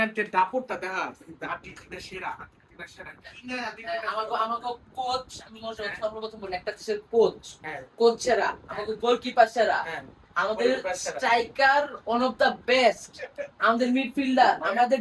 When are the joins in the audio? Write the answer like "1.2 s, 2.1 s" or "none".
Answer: none